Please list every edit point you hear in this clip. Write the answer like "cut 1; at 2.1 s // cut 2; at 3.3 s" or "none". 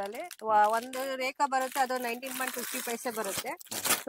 none